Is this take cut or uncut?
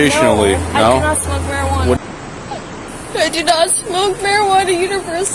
cut